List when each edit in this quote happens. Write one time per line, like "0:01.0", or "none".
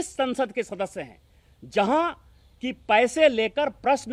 none